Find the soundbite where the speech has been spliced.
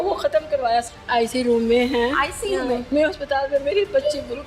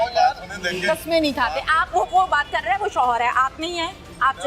first; 2 cuts; at 0.9 s, 2.8 s

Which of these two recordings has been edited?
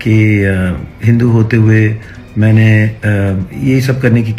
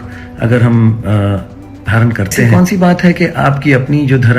second; 1 cut; at 2.4 s

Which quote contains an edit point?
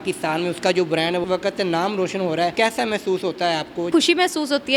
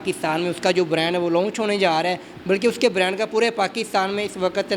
first; 3 cuts; at 1.2 s, 2.5 s, 3.9 s

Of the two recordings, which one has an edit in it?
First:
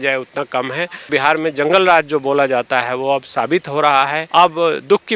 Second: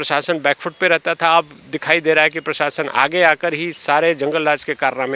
first; 2 cuts; at 1.1 s, 4.2 s

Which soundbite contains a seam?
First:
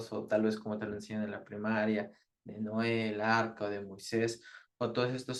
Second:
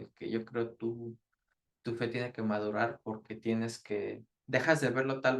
second; 1 cut; at 4.3 s

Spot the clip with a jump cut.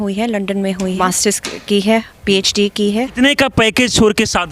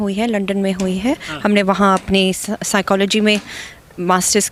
first; 2 cuts; at 1.0 s, 3.1 s

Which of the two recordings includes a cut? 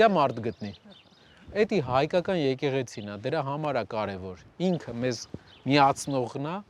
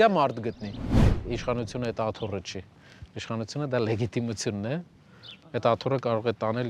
second; 1 cut; at 1.2 s

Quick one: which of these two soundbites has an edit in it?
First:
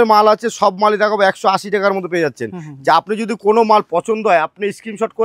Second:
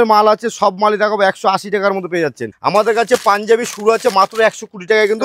second; 1 cut; at 2.5 s

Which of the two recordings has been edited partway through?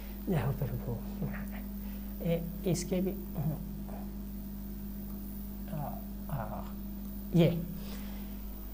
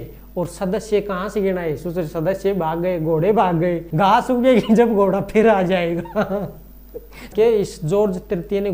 second; 2 cuts; at 3.8 s, 6.9 s

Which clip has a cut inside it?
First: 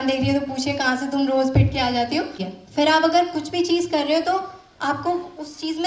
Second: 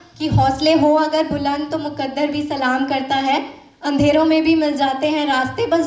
first; 1 cut; at 2.4 s

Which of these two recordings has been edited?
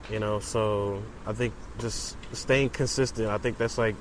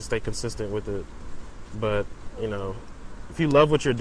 first; 1 cut; at 1.2 s

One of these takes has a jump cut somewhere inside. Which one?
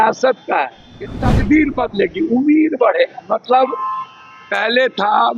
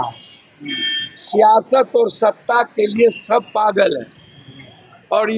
first; 1 cut; at 1.3 s

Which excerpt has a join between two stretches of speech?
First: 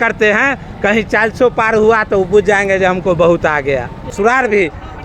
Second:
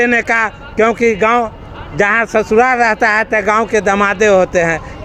first; 1 cut; at 4.1 s

